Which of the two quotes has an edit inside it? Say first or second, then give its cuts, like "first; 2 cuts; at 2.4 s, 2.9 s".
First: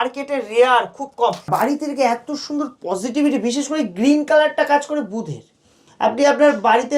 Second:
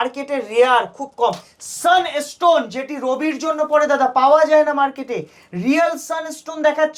first; 1 cut; at 1.5 s